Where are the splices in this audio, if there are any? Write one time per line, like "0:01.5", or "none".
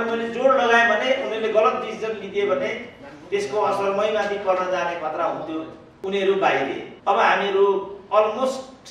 0:05.8
0:06.9